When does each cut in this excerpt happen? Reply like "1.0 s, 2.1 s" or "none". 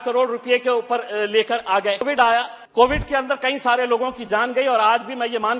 2.1 s